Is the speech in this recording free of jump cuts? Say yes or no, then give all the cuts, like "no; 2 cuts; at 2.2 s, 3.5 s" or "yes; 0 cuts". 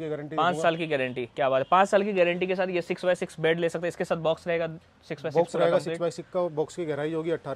yes; 0 cuts